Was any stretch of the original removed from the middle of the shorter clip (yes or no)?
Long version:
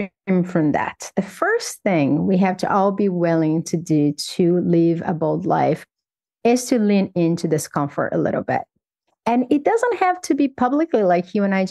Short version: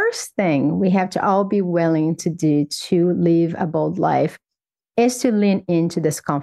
no